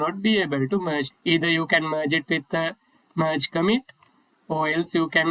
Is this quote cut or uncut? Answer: cut